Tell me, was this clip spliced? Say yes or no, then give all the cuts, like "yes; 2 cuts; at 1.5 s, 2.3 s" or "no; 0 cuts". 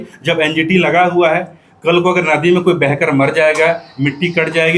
no; 0 cuts